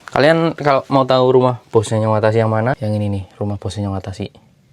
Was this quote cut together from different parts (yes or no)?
yes